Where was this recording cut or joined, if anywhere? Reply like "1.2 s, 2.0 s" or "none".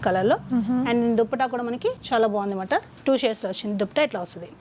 none